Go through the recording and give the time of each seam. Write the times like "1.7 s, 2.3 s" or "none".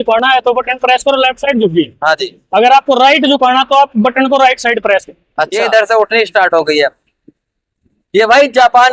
5.5 s